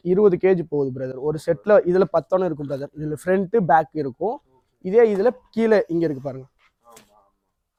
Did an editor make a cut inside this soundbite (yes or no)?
no